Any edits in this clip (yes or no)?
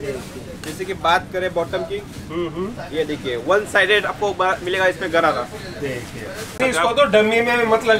yes